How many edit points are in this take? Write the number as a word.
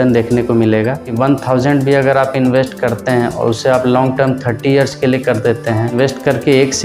two